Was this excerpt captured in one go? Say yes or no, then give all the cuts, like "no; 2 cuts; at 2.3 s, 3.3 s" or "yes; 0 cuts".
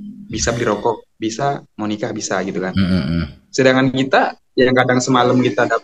yes; 0 cuts